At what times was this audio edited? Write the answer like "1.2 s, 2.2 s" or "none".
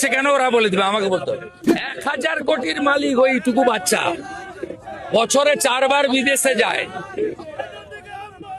1.6 s